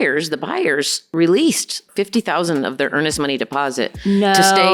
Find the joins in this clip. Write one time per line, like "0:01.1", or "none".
0:01.0
0:01.8